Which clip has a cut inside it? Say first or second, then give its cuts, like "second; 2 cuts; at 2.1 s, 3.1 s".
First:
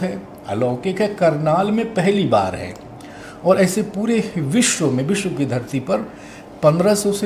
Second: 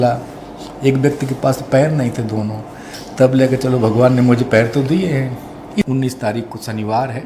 second; 1 cut; at 5.9 s